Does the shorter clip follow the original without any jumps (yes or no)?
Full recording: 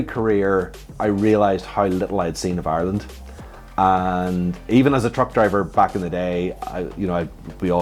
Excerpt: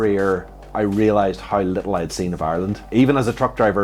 no